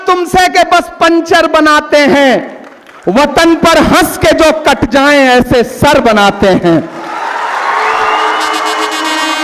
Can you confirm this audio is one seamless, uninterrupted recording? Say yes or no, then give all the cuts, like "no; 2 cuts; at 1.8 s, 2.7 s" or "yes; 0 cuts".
yes; 0 cuts